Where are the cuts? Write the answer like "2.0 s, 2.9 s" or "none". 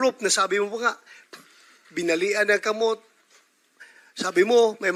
none